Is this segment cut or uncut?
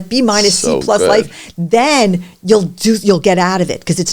uncut